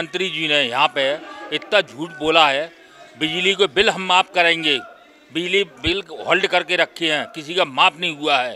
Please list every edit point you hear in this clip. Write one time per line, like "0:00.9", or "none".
none